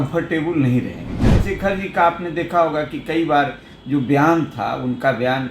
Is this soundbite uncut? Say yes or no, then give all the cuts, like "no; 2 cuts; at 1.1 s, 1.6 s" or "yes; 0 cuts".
no; 1 cut; at 1.1 s